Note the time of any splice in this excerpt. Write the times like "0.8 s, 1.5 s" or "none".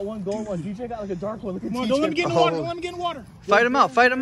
none